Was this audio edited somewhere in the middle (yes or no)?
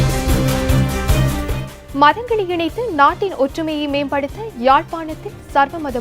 yes